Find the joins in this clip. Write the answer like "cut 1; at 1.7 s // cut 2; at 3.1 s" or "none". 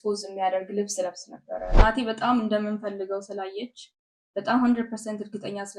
cut 1; at 1.8 s